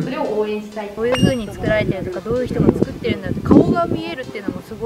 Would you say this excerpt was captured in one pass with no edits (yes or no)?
no